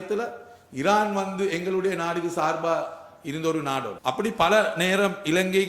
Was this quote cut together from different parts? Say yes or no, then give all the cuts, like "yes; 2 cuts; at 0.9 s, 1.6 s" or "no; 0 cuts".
yes; 1 cut; at 3.9 s